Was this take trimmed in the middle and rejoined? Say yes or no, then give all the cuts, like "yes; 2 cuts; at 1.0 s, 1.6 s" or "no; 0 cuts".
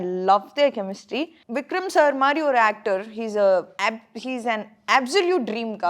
yes; 2 cuts; at 1.4 s, 3.7 s